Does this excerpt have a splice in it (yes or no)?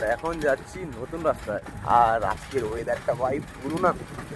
yes